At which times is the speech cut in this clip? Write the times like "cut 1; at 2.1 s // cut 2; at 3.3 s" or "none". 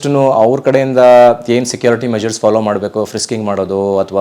none